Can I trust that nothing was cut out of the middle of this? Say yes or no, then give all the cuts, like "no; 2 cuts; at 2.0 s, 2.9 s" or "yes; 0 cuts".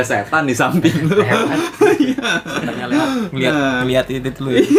yes; 0 cuts